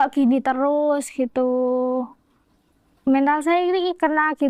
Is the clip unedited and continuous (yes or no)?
yes